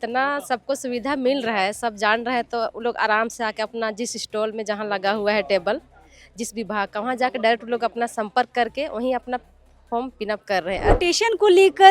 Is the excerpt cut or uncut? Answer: cut